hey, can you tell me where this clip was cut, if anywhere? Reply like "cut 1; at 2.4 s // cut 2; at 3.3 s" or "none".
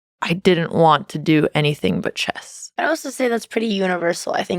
cut 1; at 2.6 s